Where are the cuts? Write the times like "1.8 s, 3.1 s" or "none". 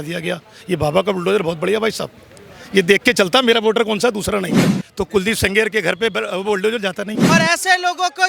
4.8 s, 7.2 s